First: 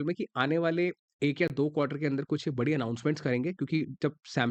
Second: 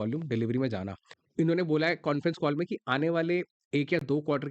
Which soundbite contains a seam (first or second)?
second